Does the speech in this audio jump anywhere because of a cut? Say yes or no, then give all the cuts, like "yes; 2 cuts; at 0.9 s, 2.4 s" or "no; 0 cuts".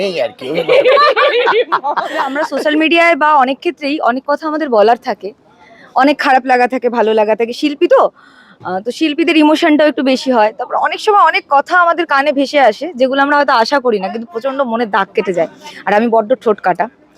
yes; 1 cut; at 2.3 s